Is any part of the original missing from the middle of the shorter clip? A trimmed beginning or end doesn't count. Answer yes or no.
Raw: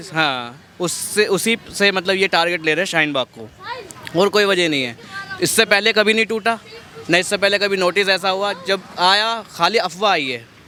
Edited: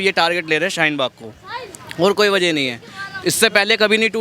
no